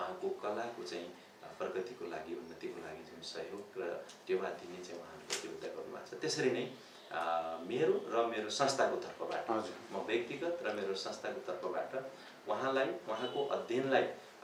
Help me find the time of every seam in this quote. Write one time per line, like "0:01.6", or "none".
none

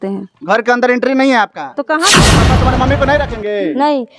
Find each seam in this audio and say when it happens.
0:02.4

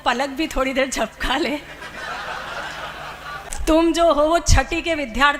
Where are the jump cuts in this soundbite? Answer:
0:03.5

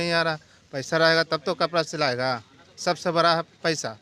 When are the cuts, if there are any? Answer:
none

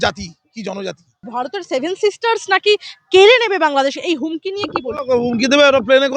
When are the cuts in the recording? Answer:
0:01.3

